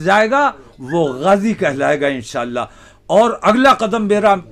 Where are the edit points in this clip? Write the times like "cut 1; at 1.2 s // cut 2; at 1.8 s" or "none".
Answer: none